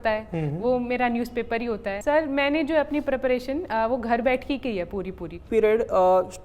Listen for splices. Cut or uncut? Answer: cut